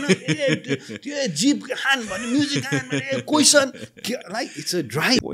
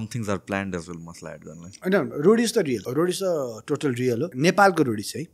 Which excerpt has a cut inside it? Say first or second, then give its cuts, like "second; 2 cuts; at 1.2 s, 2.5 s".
second; 3 cuts; at 1.7 s, 2.9 s, 4.3 s